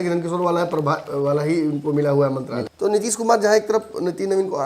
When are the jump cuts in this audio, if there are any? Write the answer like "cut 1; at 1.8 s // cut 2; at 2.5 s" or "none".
cut 1; at 2.5 s